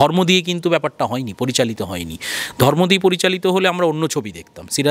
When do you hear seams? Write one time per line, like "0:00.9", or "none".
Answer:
none